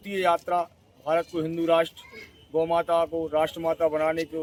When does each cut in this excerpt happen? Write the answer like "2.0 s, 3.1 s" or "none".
none